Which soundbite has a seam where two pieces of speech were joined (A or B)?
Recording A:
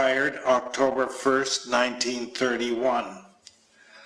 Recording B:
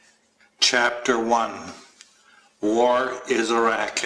A